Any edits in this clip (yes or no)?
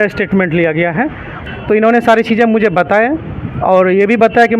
yes